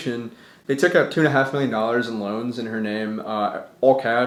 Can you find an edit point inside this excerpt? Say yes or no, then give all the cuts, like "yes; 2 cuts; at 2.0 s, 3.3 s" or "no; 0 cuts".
no; 0 cuts